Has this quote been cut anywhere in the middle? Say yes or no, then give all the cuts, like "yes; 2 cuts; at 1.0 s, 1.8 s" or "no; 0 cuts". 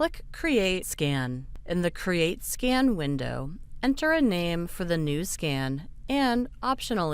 yes; 1 cut; at 1.0 s